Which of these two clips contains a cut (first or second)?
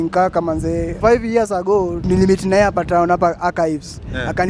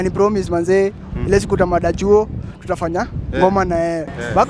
first